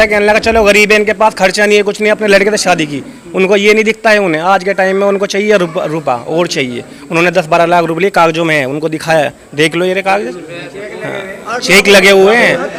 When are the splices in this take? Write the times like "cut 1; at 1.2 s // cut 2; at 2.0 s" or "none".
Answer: none